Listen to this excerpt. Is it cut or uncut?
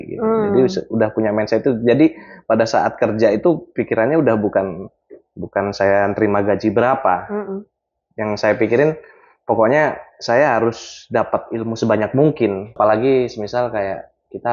cut